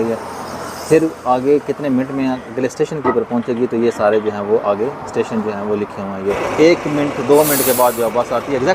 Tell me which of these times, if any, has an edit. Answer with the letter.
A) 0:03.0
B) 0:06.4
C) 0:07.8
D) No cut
B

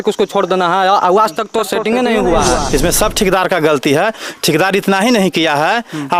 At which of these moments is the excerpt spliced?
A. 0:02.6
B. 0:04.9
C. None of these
A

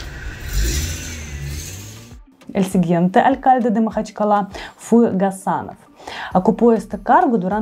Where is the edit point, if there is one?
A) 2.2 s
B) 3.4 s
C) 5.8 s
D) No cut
A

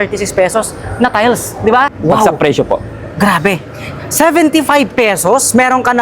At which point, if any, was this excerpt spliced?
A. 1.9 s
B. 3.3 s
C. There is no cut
A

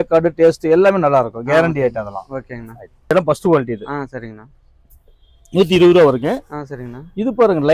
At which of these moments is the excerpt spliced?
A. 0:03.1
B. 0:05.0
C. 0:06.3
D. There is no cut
A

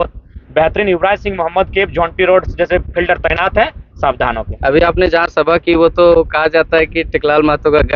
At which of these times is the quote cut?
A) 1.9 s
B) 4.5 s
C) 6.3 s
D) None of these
D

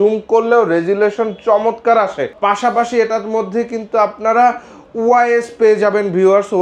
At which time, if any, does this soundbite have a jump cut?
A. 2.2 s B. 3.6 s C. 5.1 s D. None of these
D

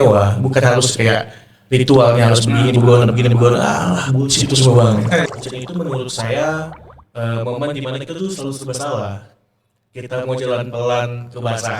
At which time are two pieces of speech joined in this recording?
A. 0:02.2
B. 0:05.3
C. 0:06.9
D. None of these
B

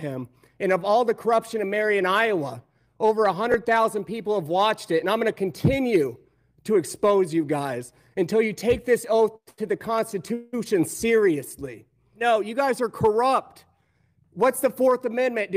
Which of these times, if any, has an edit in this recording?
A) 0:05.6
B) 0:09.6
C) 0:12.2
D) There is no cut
C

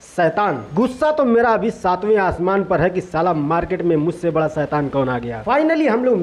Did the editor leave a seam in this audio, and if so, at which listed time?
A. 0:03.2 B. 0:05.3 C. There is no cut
B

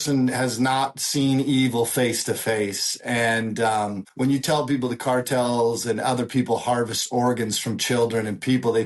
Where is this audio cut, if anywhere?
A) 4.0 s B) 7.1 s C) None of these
A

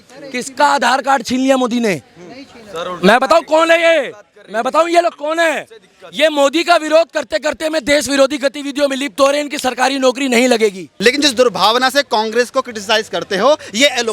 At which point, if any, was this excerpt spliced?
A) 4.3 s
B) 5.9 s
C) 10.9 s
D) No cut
C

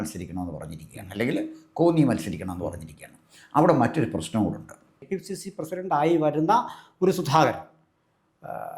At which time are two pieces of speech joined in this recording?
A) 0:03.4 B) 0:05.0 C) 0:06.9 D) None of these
B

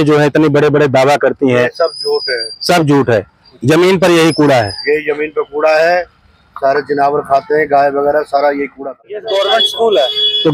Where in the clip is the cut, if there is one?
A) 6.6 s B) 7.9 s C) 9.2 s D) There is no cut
C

